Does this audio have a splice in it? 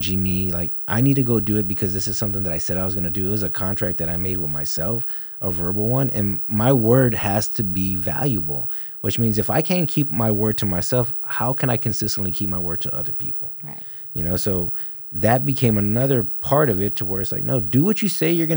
no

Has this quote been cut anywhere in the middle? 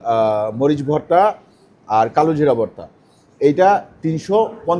no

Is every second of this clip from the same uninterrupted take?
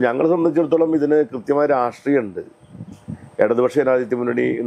yes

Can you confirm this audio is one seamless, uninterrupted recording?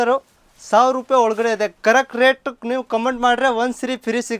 yes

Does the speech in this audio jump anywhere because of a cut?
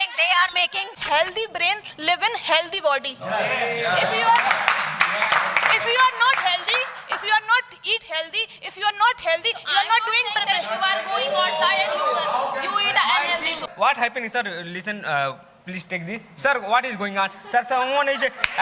yes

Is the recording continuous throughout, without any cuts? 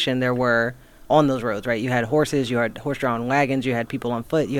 yes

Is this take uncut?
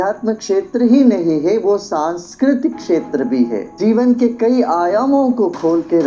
no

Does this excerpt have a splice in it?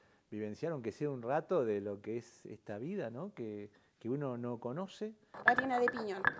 yes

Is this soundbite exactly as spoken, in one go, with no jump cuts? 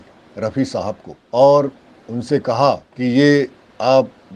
no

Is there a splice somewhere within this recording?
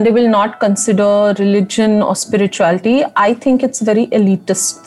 no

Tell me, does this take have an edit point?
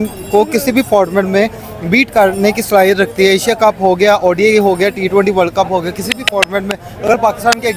no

